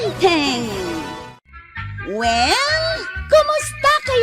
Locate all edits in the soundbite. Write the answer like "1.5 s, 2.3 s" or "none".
1.3 s